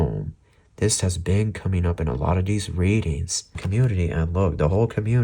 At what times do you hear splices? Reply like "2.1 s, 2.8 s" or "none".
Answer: 3.6 s